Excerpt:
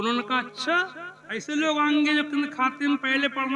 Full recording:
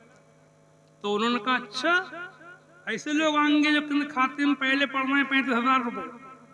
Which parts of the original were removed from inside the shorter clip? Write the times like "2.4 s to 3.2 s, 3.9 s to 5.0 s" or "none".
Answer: 2.3 s to 2.7 s